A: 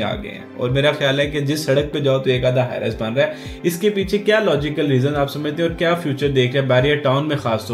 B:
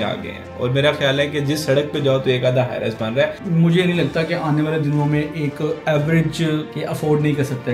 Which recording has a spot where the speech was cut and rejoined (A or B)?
B